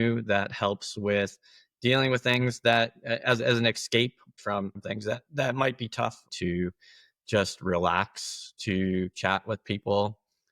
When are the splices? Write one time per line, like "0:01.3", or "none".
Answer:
0:04.3
0:06.3